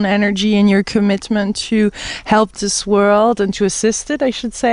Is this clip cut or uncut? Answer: cut